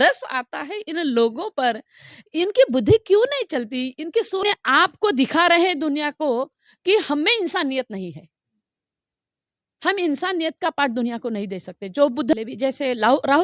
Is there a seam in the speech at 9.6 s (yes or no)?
no